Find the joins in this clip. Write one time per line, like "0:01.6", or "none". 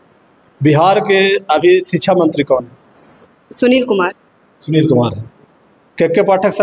none